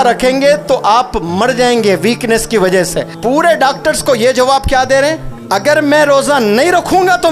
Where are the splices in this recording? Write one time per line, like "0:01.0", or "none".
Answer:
0:03.1
0:05.3